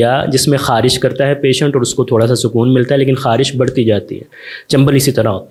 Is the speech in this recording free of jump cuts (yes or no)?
yes